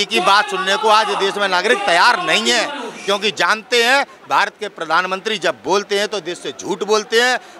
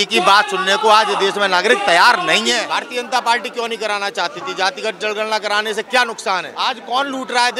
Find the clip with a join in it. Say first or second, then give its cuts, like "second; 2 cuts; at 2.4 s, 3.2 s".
second; 2 cuts; at 2.7 s, 6.5 s